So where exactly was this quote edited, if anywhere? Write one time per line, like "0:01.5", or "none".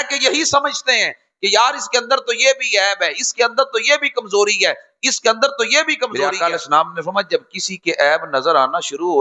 0:06.2